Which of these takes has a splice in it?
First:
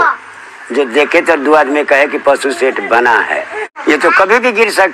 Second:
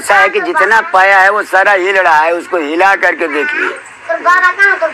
first; 1 cut; at 3.6 s

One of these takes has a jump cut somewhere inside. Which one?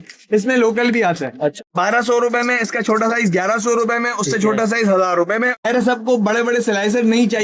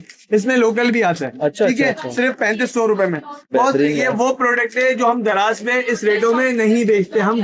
first; 2 cuts; at 1.5 s, 5.6 s

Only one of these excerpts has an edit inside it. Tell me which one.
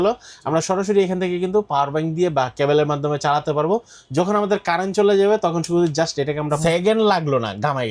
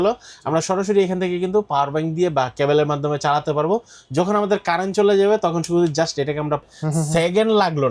first; 1 cut; at 6.6 s

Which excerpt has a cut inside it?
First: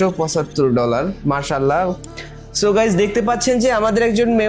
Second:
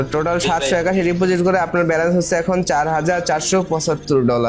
first; 1 cut; at 2.0 s

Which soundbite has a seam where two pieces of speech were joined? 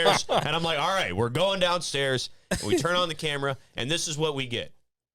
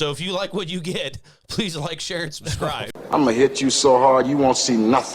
second; 1 cut; at 2.9 s

